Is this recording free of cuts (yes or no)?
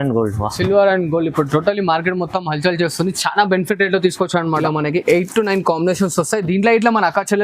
no